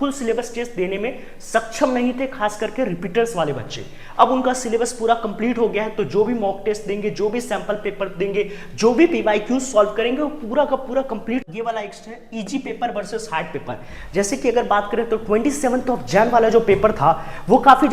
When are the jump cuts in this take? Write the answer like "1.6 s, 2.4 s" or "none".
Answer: 11.5 s